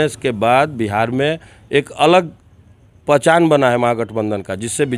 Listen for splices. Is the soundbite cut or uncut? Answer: uncut